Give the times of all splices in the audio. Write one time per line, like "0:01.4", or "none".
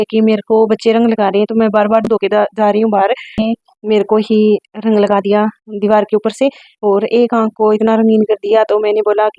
0:03.4